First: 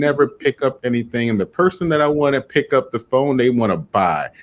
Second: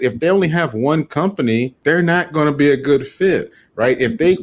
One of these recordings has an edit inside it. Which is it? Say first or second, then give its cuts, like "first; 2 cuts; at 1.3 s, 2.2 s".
second; 1 cut; at 1.7 s